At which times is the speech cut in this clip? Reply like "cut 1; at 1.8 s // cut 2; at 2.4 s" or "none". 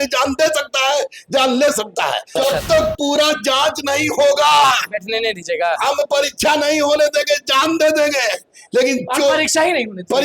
cut 1; at 2.4 s